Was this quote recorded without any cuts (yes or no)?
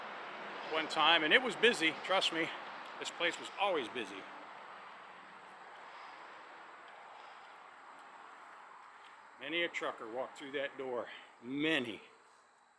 yes